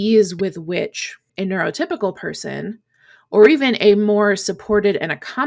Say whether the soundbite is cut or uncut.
uncut